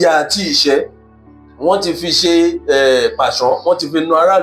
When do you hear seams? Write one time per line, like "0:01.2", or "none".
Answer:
none